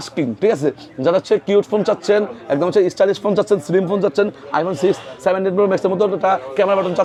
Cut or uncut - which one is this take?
uncut